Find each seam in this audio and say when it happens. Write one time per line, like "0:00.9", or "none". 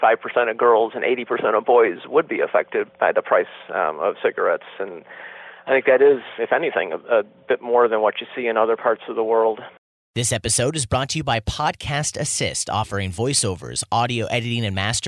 0:02.9
0:06.3
0:09.7